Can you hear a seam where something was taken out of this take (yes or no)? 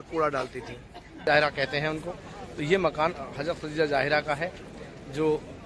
yes